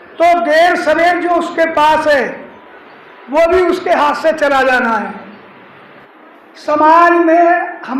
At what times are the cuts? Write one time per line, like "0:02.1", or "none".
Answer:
0:06.0